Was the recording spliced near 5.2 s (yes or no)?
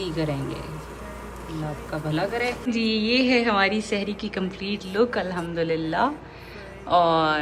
no